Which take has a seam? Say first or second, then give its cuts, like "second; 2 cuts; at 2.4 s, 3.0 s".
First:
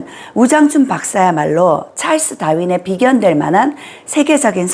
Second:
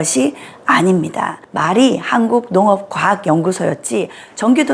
second; 1 cut; at 1.4 s